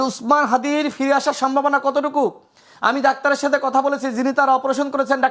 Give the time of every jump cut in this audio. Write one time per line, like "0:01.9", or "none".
none